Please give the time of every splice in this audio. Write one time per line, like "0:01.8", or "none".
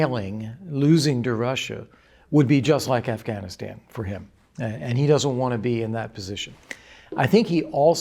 none